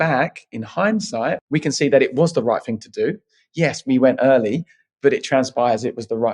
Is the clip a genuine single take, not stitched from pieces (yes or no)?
no